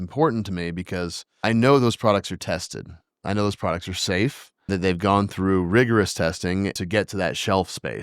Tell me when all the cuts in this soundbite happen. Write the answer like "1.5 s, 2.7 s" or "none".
1.2 s, 4.7 s, 6.8 s